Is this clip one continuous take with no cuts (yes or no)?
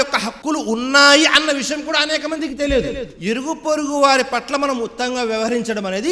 no